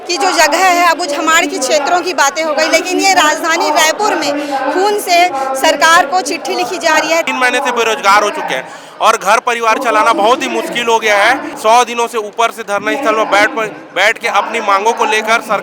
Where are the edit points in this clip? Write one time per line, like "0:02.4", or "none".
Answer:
0:07.3
0:11.5